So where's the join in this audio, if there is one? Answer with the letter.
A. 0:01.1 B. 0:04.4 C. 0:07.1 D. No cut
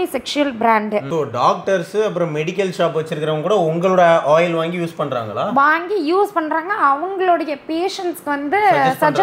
A